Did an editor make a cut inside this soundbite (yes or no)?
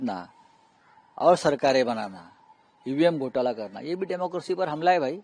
no